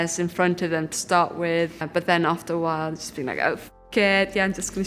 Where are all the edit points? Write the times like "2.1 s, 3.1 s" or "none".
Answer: 1.8 s